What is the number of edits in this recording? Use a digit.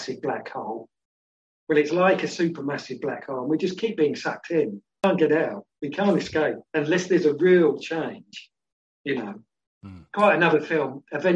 1